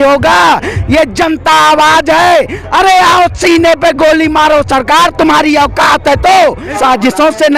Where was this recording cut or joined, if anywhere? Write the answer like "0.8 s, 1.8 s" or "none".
6.7 s

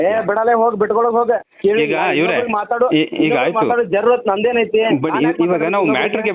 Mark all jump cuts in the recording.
1.5 s

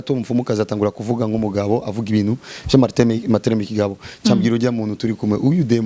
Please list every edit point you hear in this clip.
none

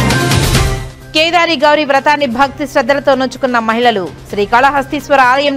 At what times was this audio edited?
0.9 s

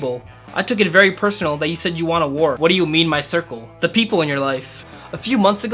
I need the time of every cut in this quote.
2.6 s, 4.8 s

